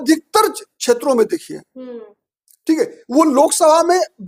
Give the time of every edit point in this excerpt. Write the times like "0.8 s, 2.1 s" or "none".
none